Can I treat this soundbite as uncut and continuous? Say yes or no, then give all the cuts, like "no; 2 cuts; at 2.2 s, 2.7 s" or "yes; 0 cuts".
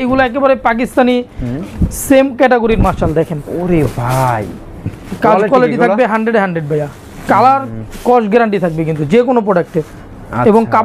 yes; 0 cuts